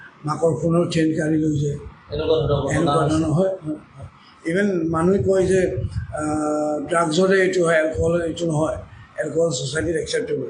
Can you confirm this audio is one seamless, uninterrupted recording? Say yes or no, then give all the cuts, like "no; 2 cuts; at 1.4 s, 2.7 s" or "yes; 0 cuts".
yes; 0 cuts